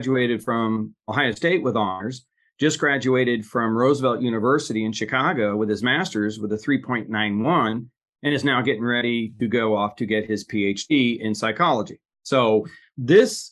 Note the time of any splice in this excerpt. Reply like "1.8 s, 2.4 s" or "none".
none